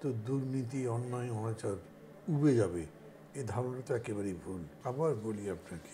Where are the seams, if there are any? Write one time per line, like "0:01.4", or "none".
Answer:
0:04.7

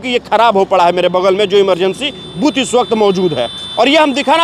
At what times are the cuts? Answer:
none

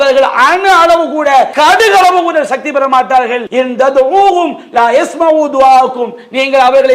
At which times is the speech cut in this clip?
0:01.5
0:03.4

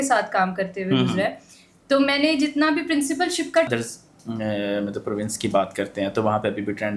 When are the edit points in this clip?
0:03.7

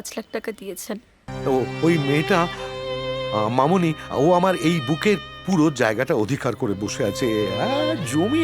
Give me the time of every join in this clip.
0:01.2

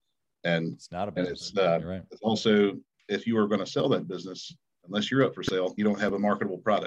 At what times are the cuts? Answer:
0:05.7

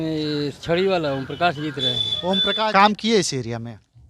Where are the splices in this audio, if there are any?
0:02.5

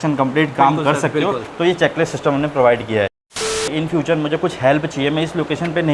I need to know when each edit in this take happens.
0:03.3

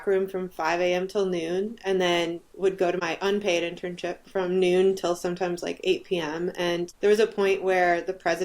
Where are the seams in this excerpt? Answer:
0:03.0
0:06.9

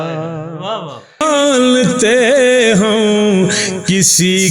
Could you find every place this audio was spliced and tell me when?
0:01.2

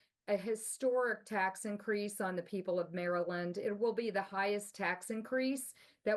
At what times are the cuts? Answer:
none

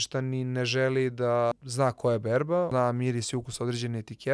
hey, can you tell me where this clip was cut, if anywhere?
0:01.5
0:02.7

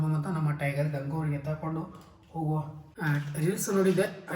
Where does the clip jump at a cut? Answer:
0:02.9

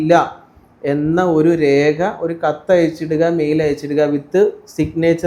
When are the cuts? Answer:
none

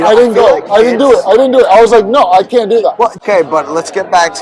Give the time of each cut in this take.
0:03.2

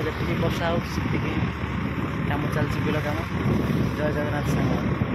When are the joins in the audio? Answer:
none

